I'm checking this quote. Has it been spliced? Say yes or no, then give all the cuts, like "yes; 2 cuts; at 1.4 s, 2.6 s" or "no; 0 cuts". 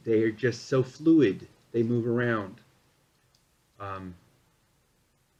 no; 0 cuts